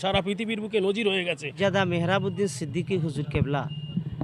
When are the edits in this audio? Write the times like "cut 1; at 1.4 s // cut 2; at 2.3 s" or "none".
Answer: cut 1; at 1.5 s